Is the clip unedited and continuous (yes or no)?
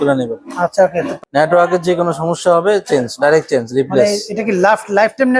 no